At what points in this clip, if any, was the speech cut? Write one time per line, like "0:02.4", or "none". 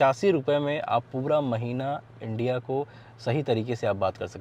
none